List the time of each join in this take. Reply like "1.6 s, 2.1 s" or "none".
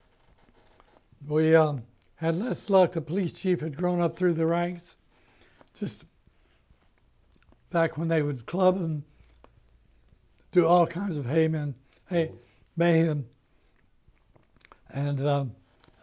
none